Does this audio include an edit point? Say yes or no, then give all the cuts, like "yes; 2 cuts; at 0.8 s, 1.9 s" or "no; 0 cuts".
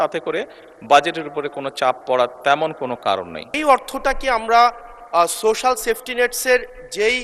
yes; 1 cut; at 3.5 s